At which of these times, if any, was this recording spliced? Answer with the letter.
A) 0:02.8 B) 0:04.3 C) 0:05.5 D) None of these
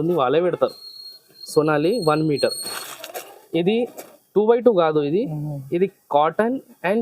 A